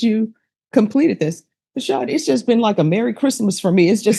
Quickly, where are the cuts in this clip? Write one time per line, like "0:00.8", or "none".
none